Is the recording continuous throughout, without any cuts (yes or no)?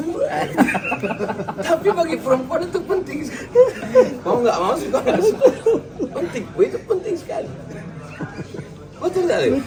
yes